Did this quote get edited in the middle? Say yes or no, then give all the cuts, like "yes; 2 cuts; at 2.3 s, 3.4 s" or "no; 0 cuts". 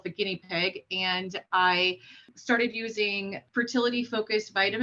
yes; 2 cuts; at 2.3 s, 3.4 s